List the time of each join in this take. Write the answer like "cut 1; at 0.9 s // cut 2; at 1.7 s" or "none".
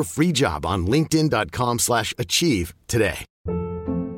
cut 1; at 3.3 s